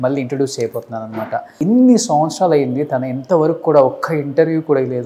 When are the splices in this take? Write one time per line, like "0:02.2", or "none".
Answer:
0:01.5